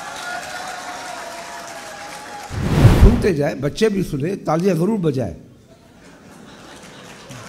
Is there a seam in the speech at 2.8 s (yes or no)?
yes